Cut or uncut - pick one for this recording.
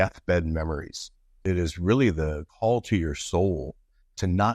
cut